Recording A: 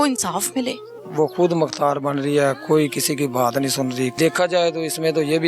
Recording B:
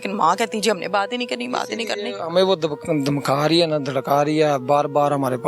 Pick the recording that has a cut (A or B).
A